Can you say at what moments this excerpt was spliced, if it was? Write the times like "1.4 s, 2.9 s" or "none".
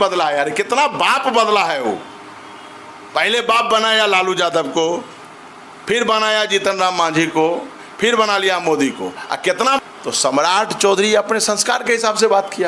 9.8 s